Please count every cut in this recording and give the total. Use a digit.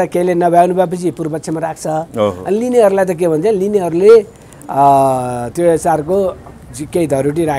0